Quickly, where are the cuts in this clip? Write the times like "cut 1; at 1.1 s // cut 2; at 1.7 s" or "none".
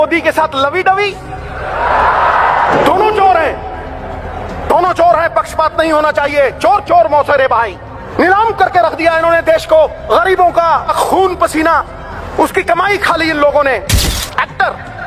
cut 1; at 8.0 s // cut 2; at 10.0 s // cut 3; at 10.9 s // cut 4; at 12.1 s // cut 5; at 14.1 s